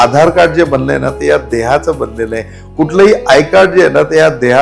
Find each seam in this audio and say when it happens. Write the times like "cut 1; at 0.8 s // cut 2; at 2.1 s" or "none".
none